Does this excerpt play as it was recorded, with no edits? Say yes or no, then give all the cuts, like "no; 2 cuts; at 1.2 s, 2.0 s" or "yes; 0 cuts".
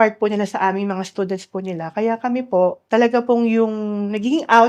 no; 1 cut; at 2.8 s